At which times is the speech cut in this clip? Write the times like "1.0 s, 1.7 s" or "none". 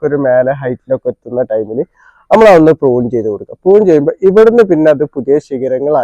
none